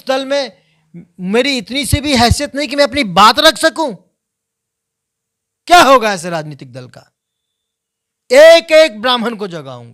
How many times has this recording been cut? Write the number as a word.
zero